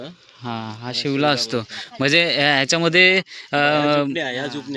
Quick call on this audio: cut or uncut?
uncut